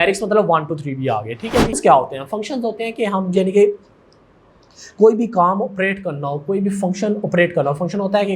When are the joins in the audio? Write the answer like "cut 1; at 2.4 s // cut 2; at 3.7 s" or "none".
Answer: cut 1; at 1.8 s